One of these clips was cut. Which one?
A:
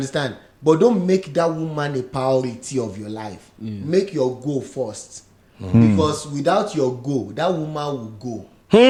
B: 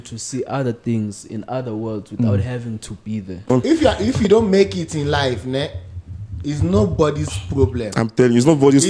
B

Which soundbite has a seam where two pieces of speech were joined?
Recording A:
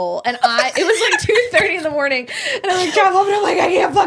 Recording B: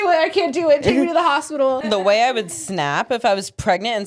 B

